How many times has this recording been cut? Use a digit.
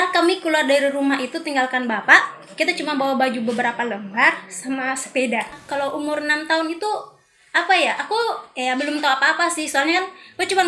1